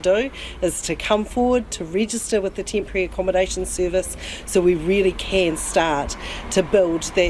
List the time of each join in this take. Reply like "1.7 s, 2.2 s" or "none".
none

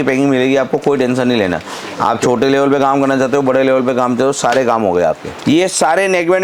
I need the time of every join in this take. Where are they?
5.3 s

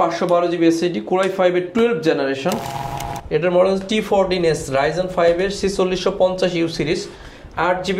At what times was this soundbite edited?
2.8 s

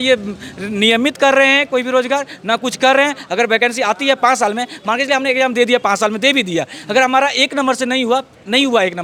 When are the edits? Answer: none

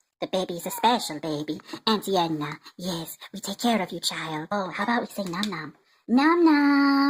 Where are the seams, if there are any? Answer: 4.5 s

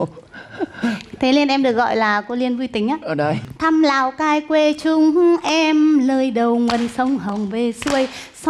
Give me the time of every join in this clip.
3.4 s

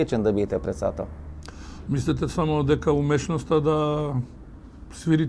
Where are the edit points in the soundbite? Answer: none

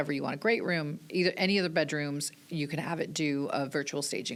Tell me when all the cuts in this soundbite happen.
none

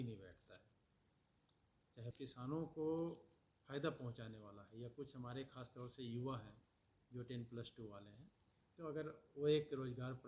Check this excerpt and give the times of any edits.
2.1 s

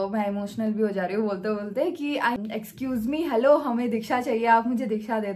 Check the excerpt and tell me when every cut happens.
2.4 s

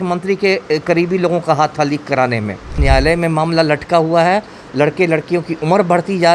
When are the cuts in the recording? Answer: 2.8 s

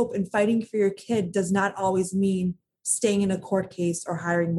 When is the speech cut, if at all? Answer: none

